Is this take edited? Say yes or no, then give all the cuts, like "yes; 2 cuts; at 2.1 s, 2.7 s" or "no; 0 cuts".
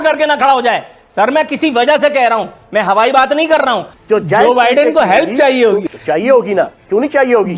yes; 2 cuts; at 3.9 s, 5.8 s